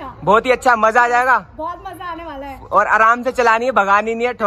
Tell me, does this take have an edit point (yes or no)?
no